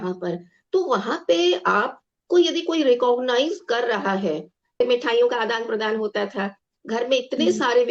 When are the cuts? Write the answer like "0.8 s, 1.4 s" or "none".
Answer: 4.8 s